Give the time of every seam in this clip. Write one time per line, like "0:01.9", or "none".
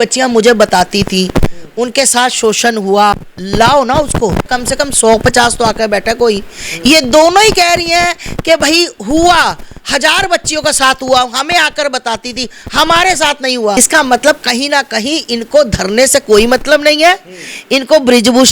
0:03.3
0:04.5
0:13.8